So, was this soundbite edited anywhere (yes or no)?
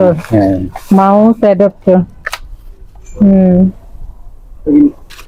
no